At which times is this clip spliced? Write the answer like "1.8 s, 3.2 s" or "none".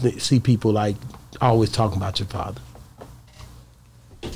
none